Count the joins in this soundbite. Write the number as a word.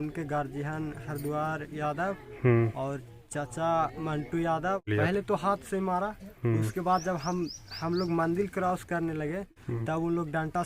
two